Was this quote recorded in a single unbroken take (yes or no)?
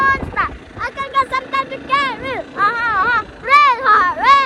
yes